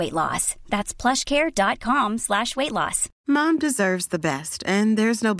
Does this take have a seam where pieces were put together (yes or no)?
yes